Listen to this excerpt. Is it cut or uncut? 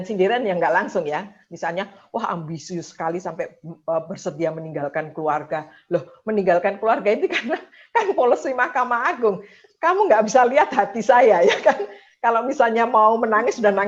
uncut